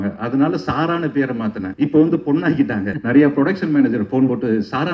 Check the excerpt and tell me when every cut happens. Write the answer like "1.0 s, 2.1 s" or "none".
1.7 s, 3.0 s